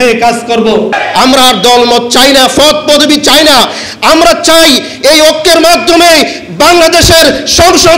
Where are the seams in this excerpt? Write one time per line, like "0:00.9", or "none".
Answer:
0:01.0